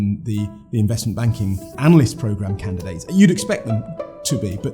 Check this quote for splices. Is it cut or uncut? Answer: cut